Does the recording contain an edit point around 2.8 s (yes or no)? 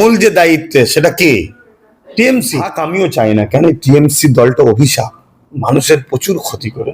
yes